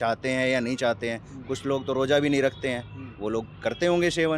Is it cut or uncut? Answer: uncut